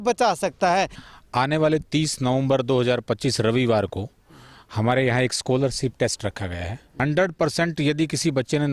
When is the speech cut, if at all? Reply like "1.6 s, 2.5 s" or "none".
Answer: 1.0 s, 6.9 s